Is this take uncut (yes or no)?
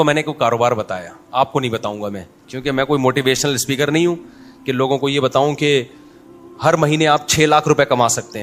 yes